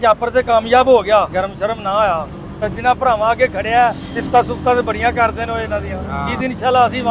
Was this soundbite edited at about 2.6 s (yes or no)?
yes